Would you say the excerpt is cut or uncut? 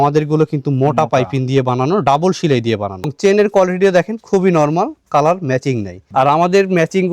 cut